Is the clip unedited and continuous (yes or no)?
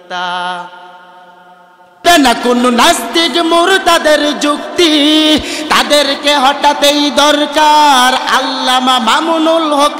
no